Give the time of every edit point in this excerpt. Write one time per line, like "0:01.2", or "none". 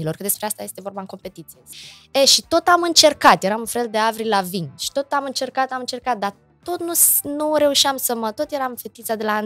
0:01.7

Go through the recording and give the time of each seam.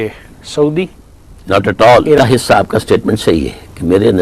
0:02.2

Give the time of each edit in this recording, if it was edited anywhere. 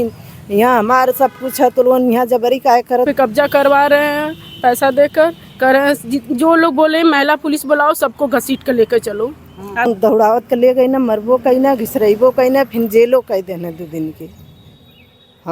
0:03.1
0:09.9

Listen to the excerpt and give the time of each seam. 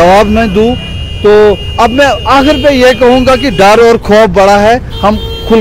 none

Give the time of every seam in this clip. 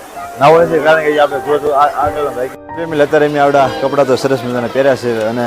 0:02.6

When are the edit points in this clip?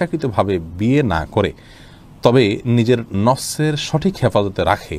none

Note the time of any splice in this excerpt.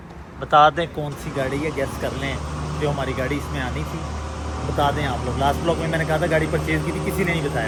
none

